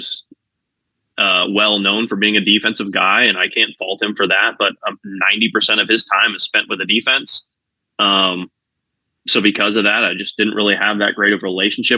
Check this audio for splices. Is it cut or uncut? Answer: uncut